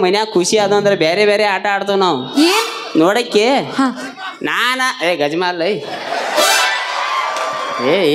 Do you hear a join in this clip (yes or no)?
no